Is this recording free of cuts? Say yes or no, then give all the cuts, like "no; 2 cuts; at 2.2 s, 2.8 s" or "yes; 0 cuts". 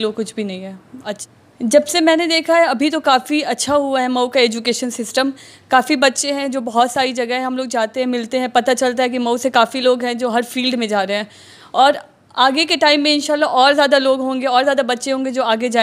no; 1 cut; at 1.2 s